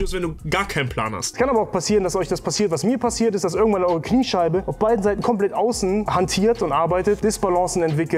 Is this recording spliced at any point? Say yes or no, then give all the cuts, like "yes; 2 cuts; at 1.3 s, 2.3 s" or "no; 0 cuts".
yes; 3 cuts; at 1.3 s, 4.7 s, 7.2 s